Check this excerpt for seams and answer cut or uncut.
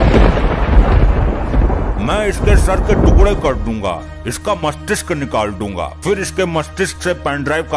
uncut